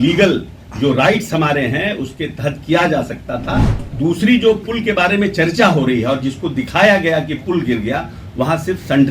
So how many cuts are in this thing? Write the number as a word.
one